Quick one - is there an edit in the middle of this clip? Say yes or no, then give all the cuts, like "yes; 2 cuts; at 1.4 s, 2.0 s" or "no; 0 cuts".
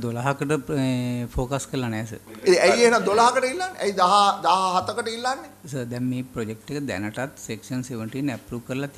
no; 0 cuts